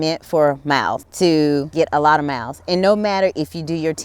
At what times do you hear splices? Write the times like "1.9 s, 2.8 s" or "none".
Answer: 1.0 s, 1.7 s